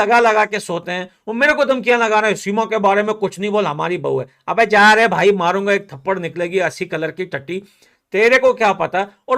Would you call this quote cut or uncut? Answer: uncut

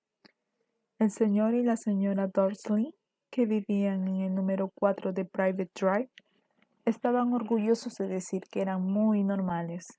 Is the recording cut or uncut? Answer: uncut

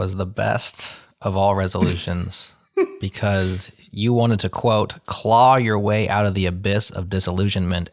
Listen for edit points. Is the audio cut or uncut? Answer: uncut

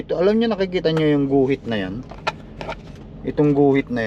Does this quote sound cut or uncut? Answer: uncut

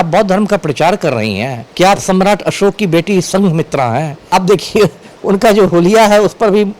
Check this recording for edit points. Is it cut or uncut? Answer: cut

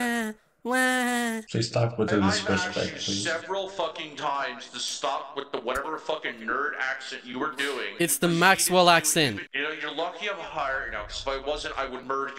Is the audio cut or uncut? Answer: uncut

